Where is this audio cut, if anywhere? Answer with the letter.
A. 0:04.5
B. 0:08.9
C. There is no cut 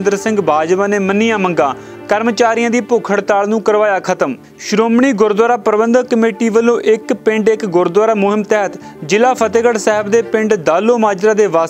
C